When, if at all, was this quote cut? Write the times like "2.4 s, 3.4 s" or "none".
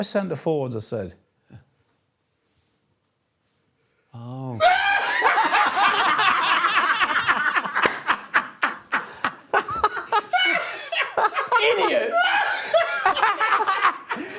none